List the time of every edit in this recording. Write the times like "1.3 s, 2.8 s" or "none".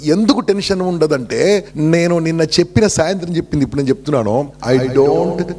1.7 s, 4.5 s